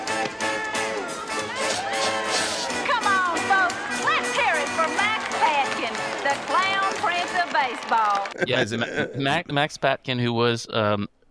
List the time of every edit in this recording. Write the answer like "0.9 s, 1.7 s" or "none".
none